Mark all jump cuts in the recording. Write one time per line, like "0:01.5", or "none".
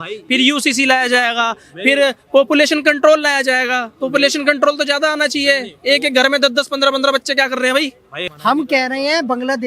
0:08.2